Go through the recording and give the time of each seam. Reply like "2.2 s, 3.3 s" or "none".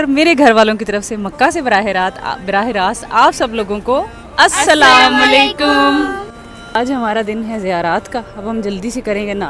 none